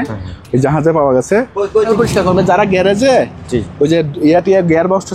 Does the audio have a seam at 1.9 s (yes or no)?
yes